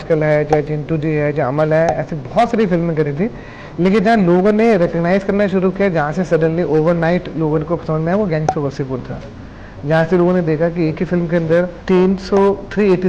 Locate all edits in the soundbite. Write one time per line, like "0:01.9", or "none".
0:11.8